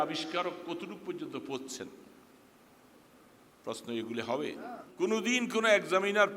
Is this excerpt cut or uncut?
cut